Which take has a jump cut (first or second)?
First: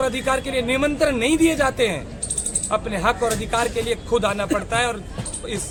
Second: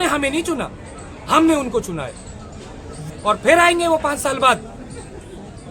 second